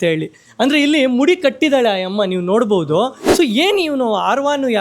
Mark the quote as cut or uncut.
cut